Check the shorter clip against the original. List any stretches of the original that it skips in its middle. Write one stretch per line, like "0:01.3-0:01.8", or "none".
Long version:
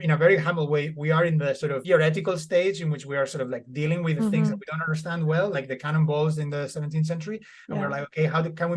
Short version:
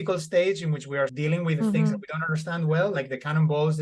0:03.3-0:03.7